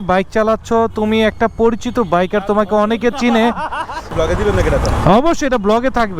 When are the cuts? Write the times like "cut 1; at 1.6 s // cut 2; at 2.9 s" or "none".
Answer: cut 1; at 4.0 s